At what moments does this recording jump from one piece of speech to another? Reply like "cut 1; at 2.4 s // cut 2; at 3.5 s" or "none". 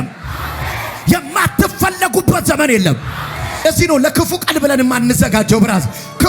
cut 1; at 3.6 s